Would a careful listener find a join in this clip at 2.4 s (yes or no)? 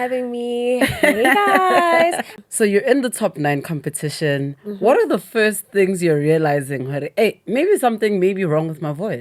yes